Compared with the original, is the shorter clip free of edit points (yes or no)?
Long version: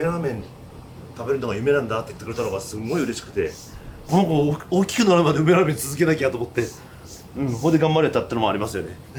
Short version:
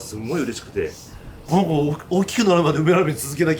yes